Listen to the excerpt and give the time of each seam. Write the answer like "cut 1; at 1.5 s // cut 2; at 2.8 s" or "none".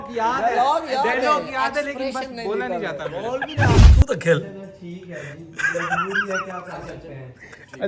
cut 1; at 3.7 s